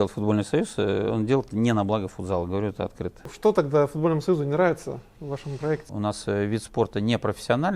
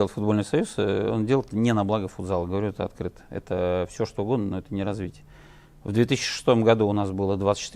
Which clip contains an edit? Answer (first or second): first